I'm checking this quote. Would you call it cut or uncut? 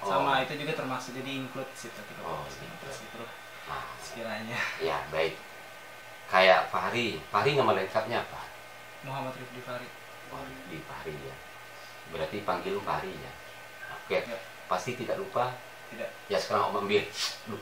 cut